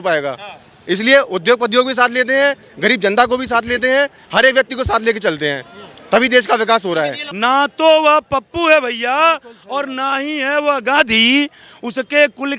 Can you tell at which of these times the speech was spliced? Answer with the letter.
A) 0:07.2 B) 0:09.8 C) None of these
A